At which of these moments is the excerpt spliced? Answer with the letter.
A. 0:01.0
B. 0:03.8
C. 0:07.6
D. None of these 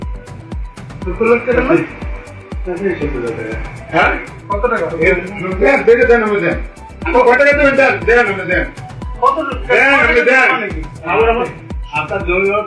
A